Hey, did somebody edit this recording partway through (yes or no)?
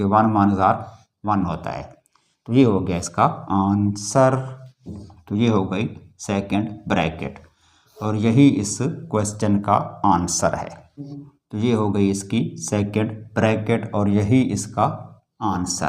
yes